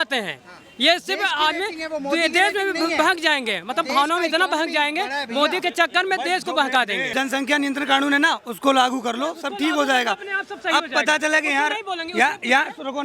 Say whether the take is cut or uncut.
cut